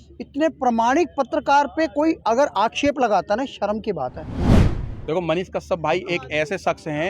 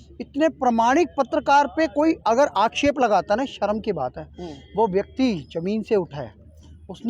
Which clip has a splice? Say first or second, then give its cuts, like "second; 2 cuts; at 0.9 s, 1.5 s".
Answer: first; 1 cut; at 4.6 s